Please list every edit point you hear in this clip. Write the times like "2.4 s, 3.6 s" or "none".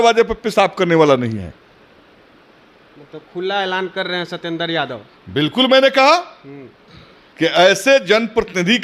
none